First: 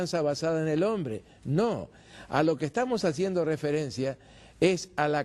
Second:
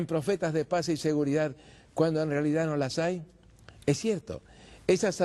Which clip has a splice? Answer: second; 1 cut; at 1.2 s

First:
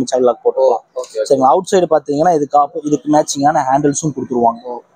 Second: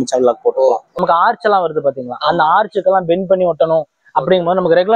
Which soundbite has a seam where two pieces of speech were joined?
second; 1 cut; at 1.0 s

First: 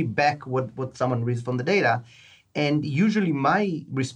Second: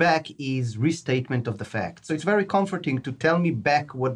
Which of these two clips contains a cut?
second; 1 cut; at 2.0 s

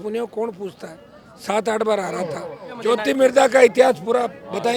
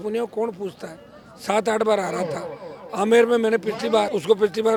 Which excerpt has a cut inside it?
first; 1 cut; at 2.8 s

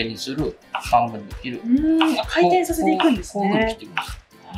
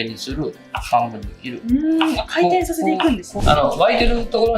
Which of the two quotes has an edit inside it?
second; 1 cut; at 3.3 s

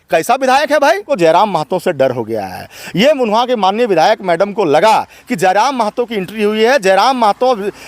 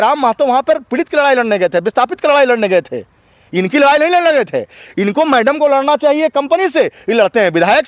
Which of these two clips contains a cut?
first; 1 cut; at 1.0 s

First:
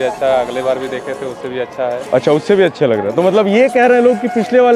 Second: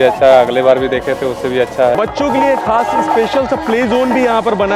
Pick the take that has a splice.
second; 1 cut; at 2.0 s

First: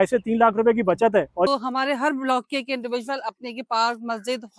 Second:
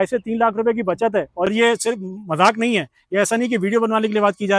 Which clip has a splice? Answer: first; 1 cut; at 1.5 s

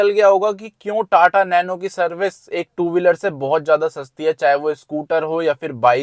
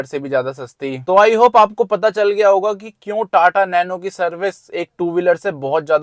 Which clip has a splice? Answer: second; 1 cut; at 1.0 s

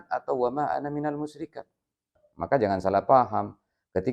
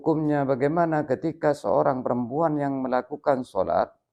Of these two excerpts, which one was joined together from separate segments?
first; 1 cut; at 2.2 s

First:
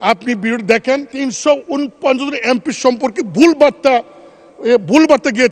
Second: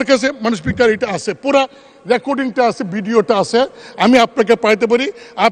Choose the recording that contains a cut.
first; 1 cut; at 1.1 s

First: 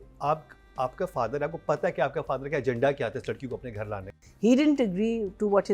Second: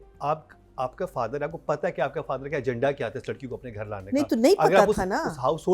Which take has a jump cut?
first; 1 cut; at 4.1 s

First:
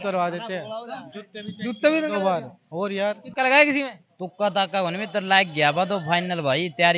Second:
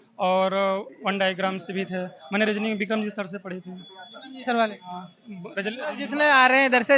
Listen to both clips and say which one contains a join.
first; 1 cut; at 3.2 s

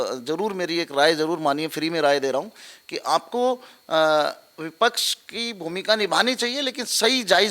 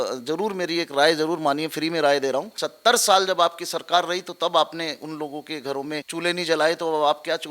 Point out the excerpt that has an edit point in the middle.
second; 2 cuts; at 2.6 s, 6.1 s

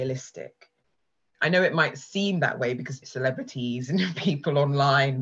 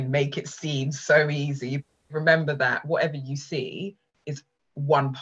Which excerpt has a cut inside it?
second; 1 cut; at 2.1 s

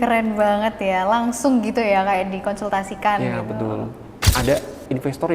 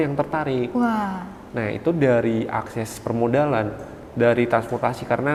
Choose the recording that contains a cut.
first; 1 cut; at 4.2 s

